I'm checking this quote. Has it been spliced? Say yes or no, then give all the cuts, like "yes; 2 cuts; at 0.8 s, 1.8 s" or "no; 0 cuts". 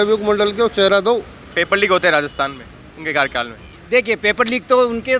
yes; 1 cut; at 1.4 s